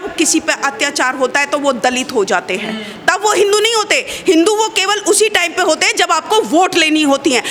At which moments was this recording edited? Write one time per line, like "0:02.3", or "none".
none